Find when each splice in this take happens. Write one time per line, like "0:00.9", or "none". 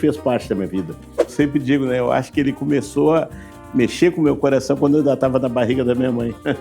0:01.3